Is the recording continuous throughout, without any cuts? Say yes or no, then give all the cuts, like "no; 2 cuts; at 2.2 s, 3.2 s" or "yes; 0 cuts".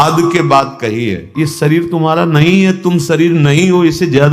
no; 1 cut; at 1.3 s